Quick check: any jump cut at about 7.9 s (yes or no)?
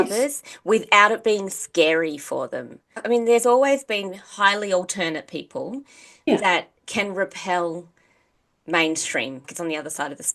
no